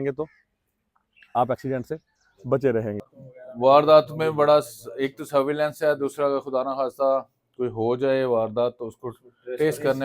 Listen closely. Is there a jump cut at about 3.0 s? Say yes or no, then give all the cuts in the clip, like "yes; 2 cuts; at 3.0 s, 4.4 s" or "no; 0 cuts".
yes; 1 cut; at 3.0 s